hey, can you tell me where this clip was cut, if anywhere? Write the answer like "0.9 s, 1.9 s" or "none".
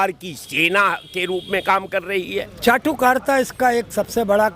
2.5 s